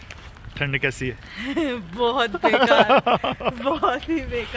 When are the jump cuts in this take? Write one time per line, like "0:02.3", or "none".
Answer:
none